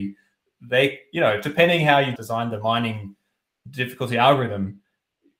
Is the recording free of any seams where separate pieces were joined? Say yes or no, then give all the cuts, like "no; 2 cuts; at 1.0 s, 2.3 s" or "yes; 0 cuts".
no; 1 cut; at 2.2 s